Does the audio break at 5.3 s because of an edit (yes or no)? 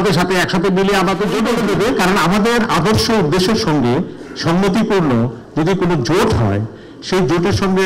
no